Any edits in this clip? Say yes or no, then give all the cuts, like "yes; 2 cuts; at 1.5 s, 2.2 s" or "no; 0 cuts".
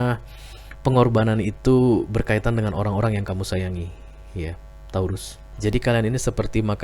yes; 1 cut; at 5.4 s